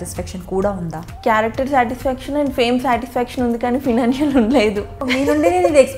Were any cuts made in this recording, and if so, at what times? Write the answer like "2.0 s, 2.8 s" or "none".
1.0 s, 5.0 s